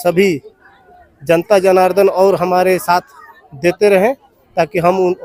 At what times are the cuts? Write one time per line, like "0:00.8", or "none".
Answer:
none